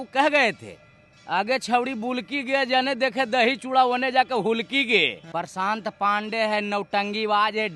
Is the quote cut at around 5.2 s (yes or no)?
yes